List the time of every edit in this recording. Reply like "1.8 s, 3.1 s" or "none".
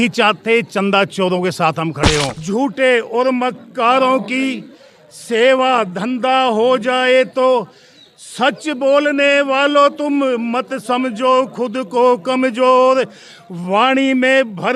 2.4 s

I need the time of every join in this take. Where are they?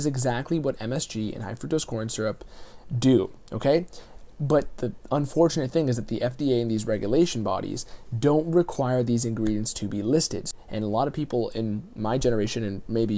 10.5 s

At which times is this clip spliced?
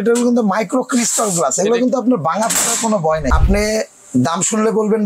3.3 s

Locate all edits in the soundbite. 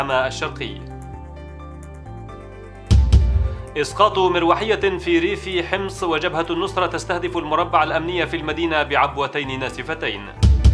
0.8 s, 2.9 s

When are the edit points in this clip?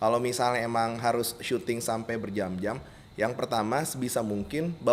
none

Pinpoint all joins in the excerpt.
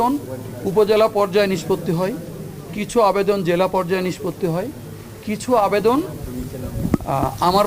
none

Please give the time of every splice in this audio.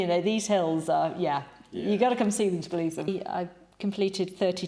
3.1 s

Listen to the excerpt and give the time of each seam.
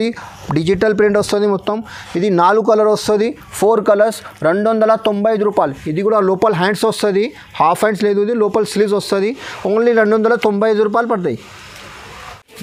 none

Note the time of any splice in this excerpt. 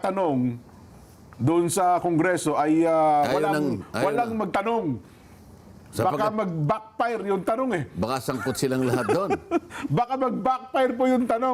none

